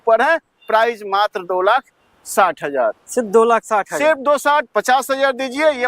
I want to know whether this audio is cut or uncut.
uncut